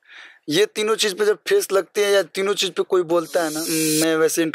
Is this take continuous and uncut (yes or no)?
no